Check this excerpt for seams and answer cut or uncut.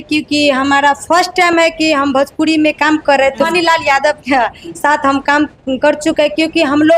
cut